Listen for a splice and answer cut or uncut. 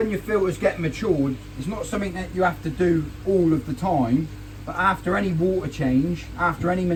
uncut